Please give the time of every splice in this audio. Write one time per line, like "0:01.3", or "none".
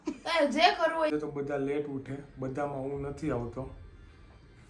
0:01.1